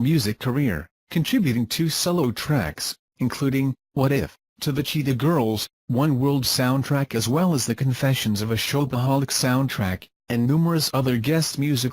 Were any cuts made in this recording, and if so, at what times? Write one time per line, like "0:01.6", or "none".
0:06.6